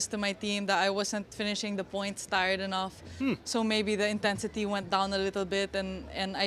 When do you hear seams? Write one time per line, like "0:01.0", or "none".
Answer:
none